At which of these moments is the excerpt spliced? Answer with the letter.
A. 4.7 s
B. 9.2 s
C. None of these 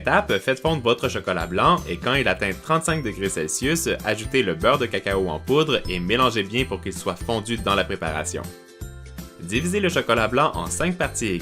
A